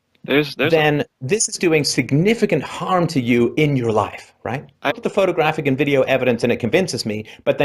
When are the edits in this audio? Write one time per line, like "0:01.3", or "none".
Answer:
none